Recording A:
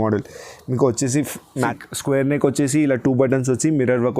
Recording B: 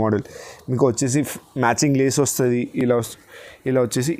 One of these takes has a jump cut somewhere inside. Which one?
A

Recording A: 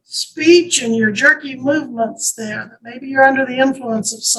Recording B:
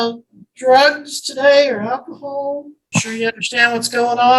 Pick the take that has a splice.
B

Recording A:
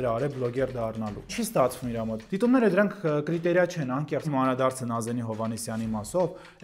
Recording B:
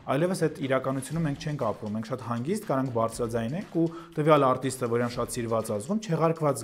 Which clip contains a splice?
A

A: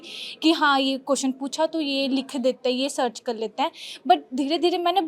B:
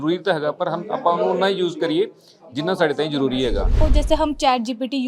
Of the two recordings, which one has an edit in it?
B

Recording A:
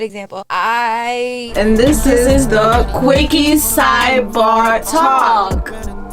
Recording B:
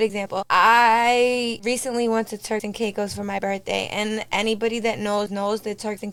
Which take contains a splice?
A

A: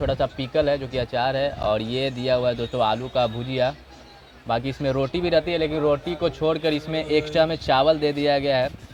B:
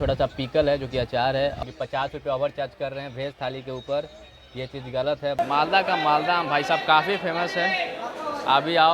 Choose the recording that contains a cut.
B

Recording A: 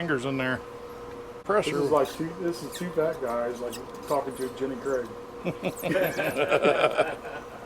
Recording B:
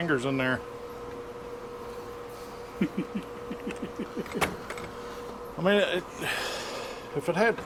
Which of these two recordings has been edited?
A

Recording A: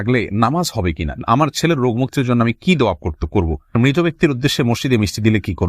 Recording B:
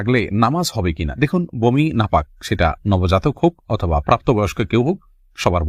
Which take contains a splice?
A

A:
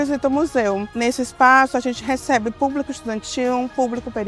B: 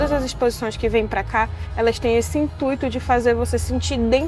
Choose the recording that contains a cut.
A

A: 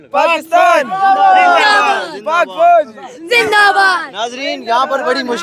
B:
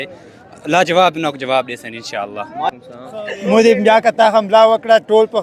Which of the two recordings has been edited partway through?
B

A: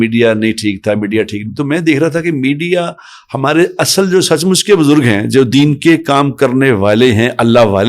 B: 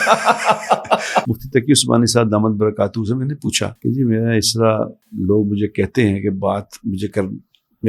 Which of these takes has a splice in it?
B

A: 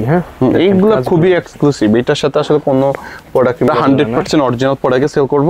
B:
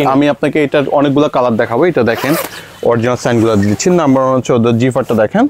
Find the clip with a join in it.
A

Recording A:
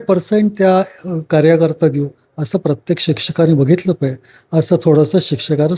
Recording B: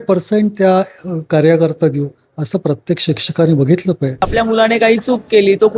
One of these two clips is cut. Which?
B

